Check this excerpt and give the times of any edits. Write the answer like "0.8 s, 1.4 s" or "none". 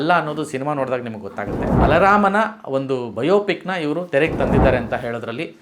1.8 s

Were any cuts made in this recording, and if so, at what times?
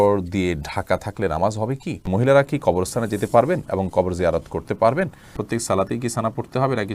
2.1 s, 5.3 s

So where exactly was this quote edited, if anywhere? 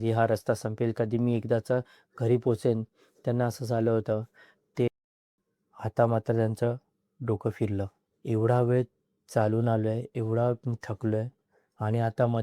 4.9 s

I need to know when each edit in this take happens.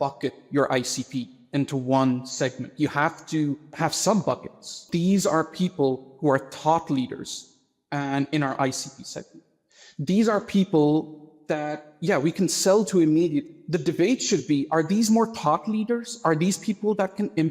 3.6 s, 4.8 s

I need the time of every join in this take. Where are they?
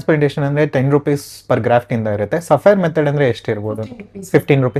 none

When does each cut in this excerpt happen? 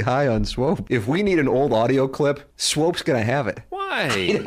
0.8 s, 2.5 s

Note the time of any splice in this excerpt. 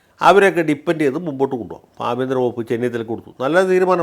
none

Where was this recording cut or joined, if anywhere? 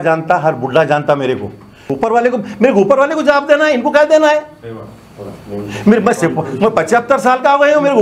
1.8 s

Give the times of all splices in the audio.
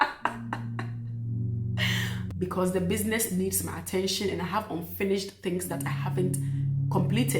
2.2 s

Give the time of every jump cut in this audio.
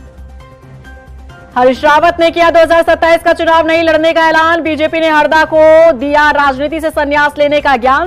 1.1 s

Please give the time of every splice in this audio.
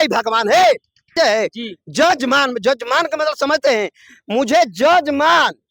1.0 s

